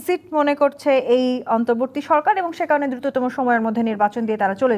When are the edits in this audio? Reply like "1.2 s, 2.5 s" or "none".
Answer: none